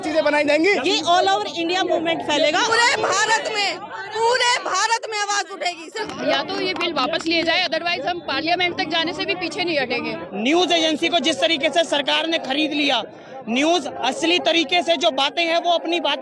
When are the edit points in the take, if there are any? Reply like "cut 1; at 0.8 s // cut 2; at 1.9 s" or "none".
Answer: cut 1; at 0.8 s // cut 2; at 2.7 s // cut 3; at 6.1 s // cut 4; at 10.2 s